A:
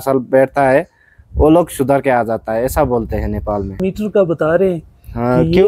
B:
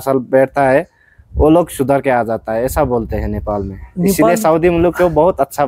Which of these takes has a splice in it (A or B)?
A